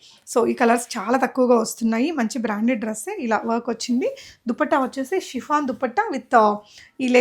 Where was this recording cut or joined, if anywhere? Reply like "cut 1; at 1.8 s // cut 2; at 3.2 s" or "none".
none